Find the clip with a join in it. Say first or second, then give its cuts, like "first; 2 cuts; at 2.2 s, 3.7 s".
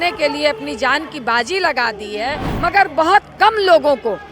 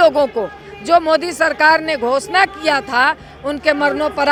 first; 1 cut; at 2.4 s